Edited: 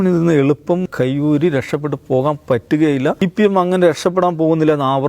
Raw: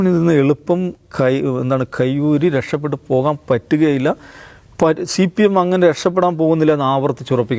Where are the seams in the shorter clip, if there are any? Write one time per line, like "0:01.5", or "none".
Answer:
0:00.9
0:03.2